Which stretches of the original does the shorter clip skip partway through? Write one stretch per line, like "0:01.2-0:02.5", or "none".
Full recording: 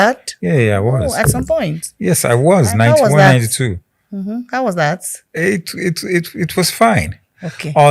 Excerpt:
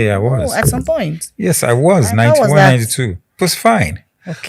0:03.9-0:06.4